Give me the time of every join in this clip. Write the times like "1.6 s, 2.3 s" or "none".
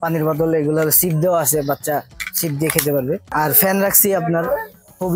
3.3 s

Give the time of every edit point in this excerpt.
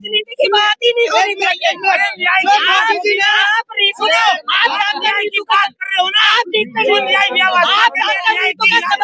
none

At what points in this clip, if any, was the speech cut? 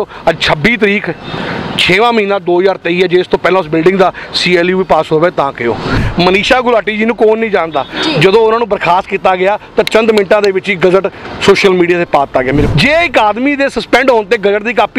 6.0 s, 12.7 s

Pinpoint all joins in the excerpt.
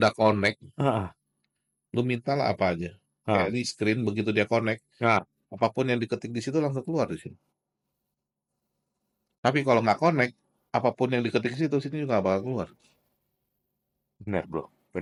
none

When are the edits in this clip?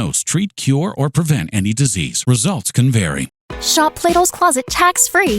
3.4 s

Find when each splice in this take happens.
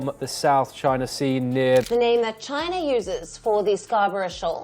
1.9 s

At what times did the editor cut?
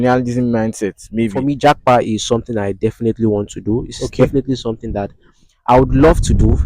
1.4 s

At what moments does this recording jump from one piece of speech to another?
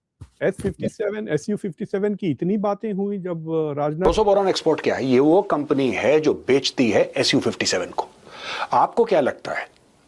4.0 s

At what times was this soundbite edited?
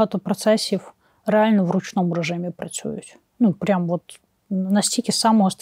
none

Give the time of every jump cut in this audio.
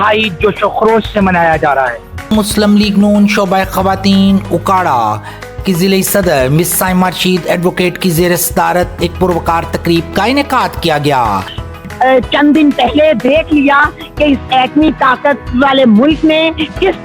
2.3 s, 11.5 s

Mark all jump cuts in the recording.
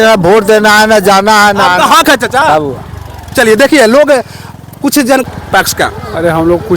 5.2 s

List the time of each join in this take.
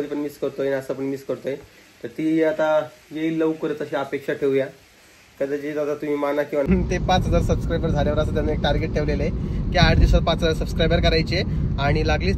6.7 s

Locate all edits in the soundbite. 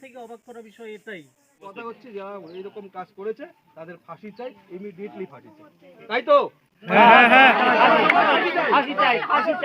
1.7 s

